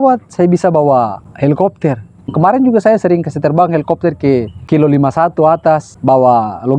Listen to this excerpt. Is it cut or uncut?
cut